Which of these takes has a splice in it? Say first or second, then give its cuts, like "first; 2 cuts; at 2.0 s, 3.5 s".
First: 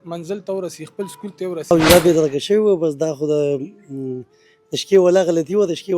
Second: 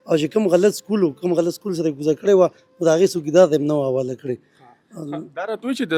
first; 1 cut; at 1.7 s